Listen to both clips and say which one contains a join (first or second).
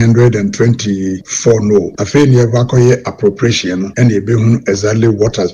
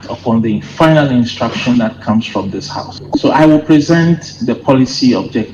first